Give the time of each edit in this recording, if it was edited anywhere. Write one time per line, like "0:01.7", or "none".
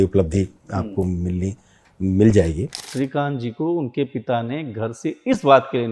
0:02.9